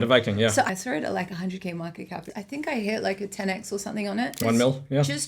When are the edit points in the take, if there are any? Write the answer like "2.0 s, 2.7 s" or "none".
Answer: 0.7 s, 2.2 s, 4.4 s